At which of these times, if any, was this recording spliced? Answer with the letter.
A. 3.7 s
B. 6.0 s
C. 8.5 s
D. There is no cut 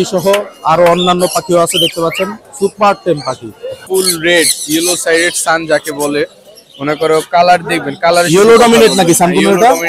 A